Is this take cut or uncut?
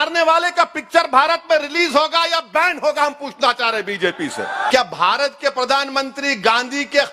cut